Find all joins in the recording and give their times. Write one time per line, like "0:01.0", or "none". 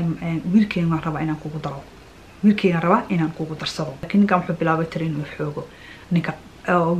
0:04.0